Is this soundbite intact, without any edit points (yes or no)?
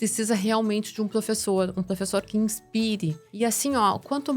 no